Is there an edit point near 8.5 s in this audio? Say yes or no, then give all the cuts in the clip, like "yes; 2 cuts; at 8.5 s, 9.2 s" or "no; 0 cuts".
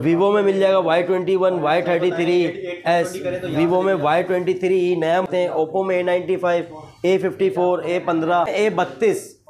yes; 2 cuts; at 5.3 s, 8.5 s